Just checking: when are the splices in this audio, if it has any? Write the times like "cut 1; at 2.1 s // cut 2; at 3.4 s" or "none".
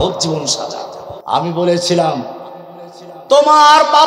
cut 1; at 1.1 s